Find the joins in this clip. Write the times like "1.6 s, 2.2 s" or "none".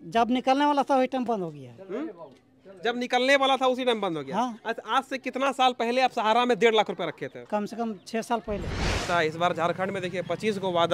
9.0 s